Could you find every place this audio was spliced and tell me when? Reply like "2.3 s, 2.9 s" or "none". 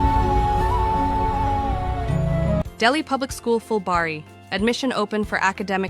2.0 s